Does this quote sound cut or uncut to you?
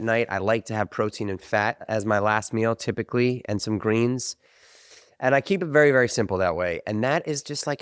cut